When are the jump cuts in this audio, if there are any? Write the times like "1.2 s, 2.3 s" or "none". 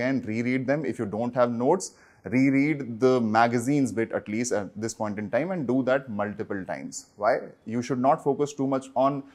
none

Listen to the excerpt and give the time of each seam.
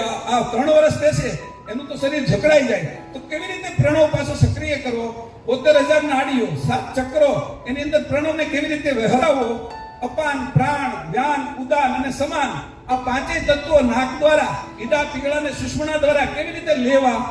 none

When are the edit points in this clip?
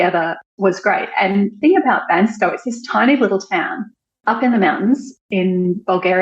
5.2 s

